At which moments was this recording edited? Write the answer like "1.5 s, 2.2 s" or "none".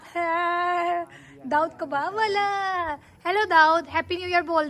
none